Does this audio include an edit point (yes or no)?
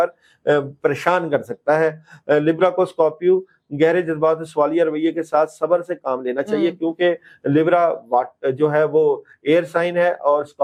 no